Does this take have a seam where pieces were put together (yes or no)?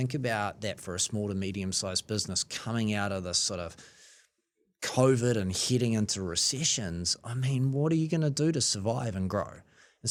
no